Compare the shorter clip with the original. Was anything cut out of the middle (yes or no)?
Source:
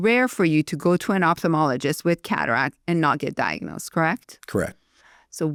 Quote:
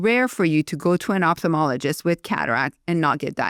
no